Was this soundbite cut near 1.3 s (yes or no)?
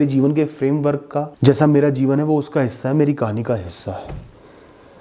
yes